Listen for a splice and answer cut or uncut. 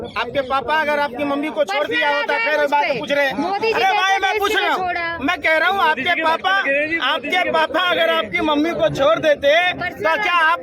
uncut